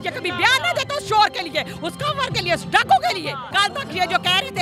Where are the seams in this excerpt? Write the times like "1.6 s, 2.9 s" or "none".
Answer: 3.4 s